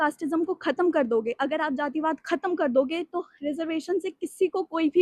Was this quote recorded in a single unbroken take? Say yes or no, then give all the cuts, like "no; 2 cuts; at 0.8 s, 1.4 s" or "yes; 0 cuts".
yes; 0 cuts